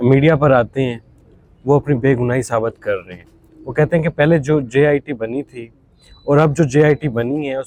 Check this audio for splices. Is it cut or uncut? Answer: uncut